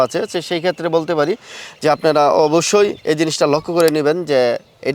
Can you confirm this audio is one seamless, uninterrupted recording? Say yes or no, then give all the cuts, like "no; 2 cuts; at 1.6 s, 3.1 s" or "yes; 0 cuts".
yes; 0 cuts